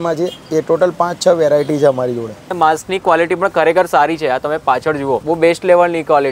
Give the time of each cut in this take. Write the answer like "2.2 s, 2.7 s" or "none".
2.5 s, 5.2 s